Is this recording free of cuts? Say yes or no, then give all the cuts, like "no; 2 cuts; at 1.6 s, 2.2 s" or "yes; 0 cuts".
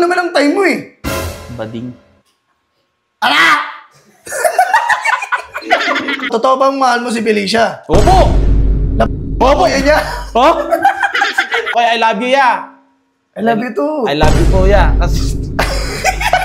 no; 2 cuts; at 6.3 s, 11.7 s